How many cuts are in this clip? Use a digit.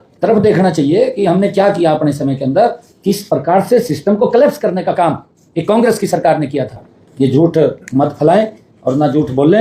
1